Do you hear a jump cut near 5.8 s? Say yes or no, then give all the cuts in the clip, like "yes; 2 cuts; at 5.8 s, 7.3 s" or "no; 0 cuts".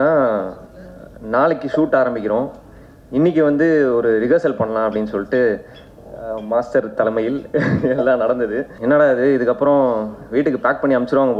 no; 1 cut; at 8.7 s